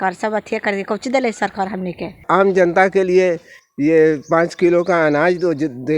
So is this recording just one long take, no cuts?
no; 1 cut; at 2.2 s

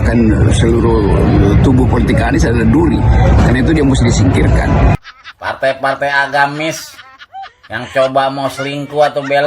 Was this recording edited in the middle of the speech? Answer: yes; 1 cut; at 4.9 s

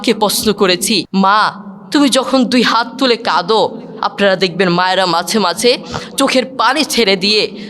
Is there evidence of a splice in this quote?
yes; 1 cut; at 1.1 s

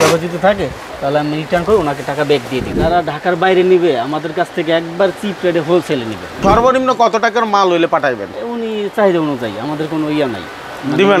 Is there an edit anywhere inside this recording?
yes; 2 cuts; at 2.7 s, 6.4 s

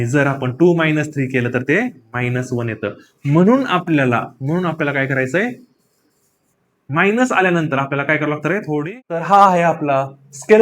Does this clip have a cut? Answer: yes; 1 cut; at 9.3 s

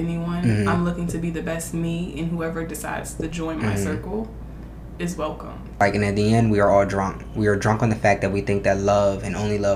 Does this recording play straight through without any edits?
no; 1 cut; at 5.8 s

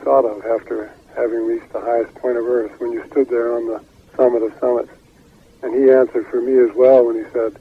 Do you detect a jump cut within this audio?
no; 0 cuts

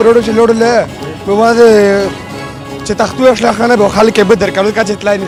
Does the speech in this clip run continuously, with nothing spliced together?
yes; 0 cuts

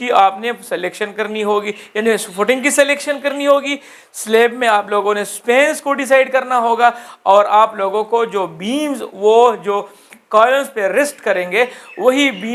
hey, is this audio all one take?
yes; 0 cuts

